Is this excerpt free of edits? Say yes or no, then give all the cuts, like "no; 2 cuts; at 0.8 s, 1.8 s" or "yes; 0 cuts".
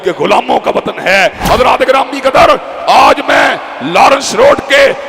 no; 1 cut; at 1.4 s